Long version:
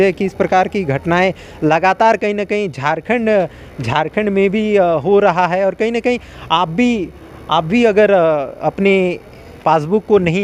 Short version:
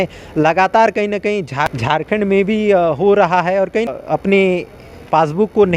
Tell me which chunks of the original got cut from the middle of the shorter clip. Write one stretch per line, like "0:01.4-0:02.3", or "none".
0:03.0-0:03.8
0:05.9-0:08.4